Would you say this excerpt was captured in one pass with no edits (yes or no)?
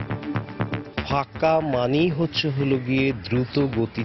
no